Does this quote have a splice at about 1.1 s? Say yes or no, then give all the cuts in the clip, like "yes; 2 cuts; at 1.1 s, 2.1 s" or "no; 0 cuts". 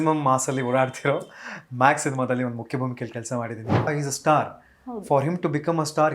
no; 1 cut; at 3.9 s